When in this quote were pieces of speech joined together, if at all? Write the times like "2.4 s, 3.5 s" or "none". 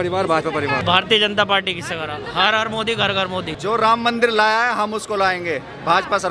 0.8 s, 3.5 s